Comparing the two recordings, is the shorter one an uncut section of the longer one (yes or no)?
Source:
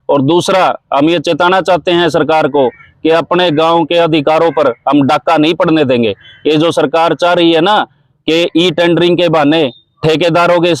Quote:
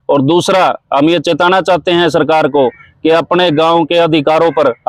yes